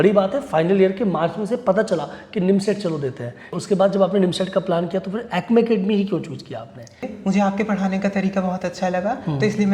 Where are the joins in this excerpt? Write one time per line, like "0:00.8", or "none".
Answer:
0:03.5
0:07.1